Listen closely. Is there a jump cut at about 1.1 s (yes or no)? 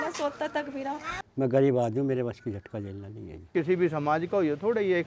yes